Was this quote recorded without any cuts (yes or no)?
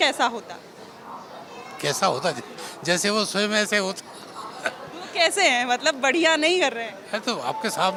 yes